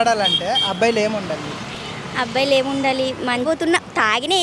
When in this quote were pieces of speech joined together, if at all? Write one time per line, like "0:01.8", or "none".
0:03.4